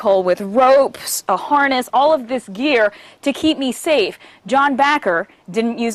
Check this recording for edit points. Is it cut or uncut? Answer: uncut